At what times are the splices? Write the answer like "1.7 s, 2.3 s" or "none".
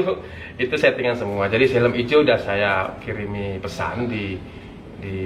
none